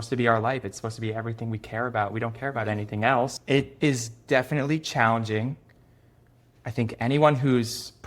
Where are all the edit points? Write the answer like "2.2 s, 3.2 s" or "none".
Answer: 3.4 s